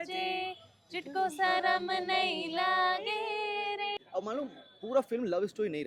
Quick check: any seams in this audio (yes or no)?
yes